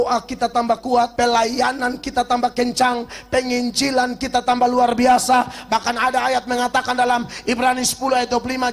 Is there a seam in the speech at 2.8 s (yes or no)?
no